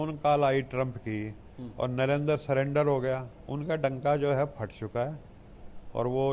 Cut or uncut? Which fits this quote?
cut